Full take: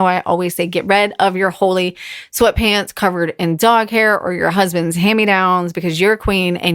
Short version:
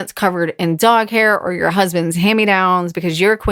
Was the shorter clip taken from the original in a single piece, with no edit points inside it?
yes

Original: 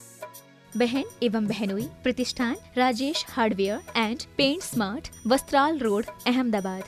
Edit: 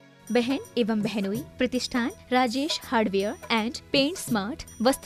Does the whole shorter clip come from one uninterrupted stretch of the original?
yes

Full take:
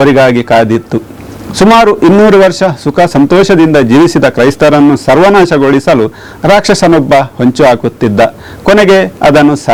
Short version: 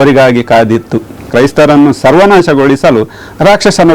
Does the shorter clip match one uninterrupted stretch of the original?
no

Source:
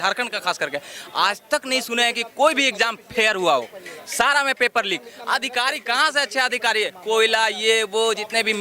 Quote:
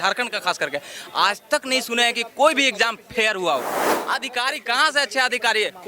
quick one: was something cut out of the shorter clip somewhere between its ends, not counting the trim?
yes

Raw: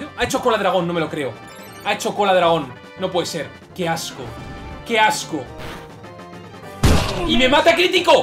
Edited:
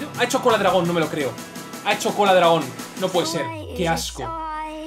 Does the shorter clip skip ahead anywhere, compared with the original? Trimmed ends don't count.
no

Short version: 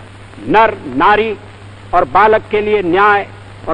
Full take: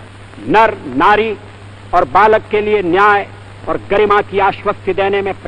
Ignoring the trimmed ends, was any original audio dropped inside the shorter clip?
no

